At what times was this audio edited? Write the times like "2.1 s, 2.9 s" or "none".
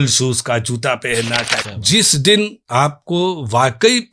1.6 s